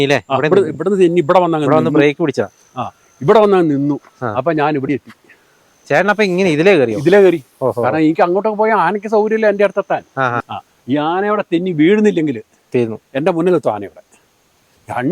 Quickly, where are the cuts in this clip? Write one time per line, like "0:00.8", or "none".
0:10.4